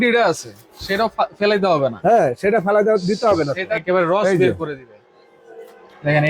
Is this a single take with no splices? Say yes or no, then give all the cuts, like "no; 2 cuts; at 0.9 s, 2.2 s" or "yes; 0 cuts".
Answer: no; 1 cut; at 3.8 s